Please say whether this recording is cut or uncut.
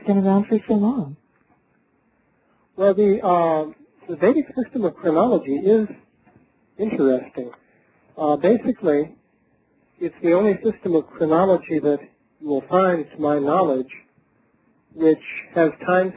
uncut